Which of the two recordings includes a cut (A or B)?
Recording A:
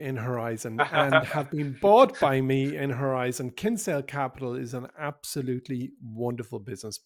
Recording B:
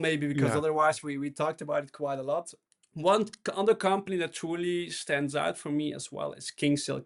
B